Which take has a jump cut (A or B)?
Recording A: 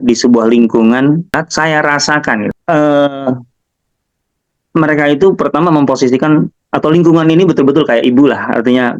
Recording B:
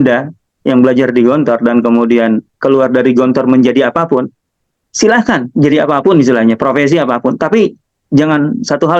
A